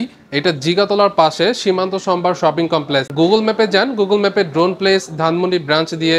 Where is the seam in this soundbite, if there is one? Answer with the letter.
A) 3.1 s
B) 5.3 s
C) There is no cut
A